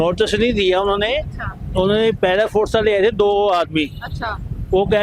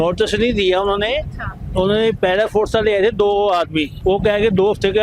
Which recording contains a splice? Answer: second; 1 cut; at 3.9 s

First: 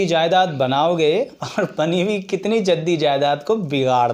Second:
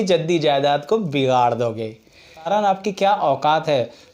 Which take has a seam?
second; 1 cut; at 2.5 s

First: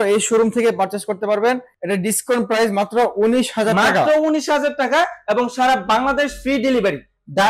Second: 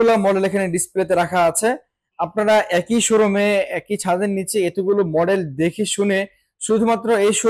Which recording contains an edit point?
first; 1 cut; at 1.7 s

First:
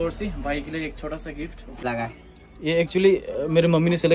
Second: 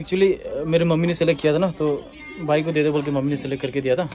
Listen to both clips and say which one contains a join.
first; 1 cut; at 1.8 s

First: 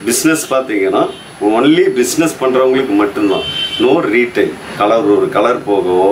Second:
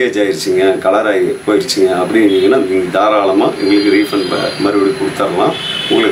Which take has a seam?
first; 1 cut; at 4.6 s

